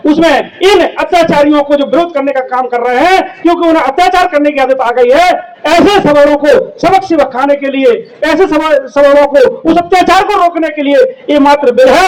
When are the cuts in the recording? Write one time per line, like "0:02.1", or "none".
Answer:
none